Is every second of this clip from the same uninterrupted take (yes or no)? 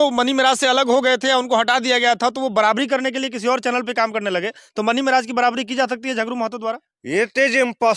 yes